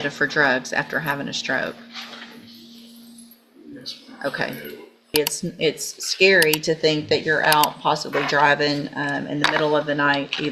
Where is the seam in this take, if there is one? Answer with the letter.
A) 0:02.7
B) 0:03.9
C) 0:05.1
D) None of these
C